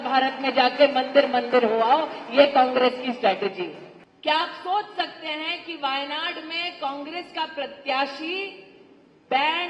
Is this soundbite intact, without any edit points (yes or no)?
yes